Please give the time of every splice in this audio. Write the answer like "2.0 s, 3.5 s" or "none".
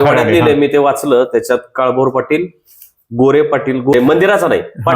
3.9 s

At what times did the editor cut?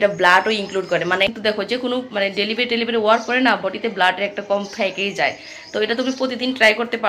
1.4 s

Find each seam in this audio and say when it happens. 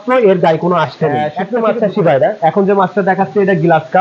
1.4 s

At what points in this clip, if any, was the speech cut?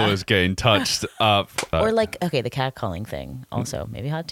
1.7 s

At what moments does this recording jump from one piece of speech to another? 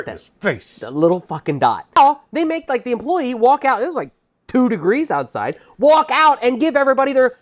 2.0 s

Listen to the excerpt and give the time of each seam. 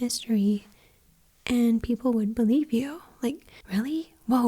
3.5 s

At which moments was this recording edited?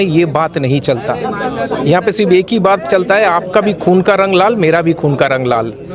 none

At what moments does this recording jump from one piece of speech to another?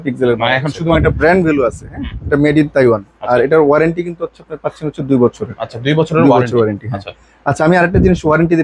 1.0 s

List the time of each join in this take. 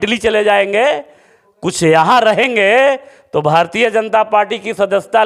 none

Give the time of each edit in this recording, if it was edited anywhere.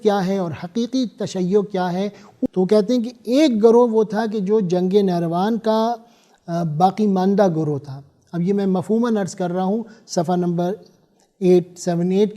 2.5 s

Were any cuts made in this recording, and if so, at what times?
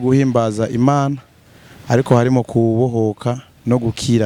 none

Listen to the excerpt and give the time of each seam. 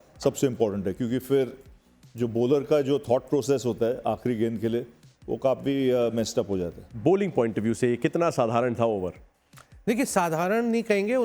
none

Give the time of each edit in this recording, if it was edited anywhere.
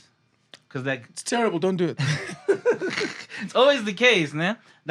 none

